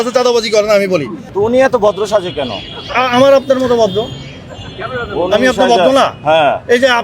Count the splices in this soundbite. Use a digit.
1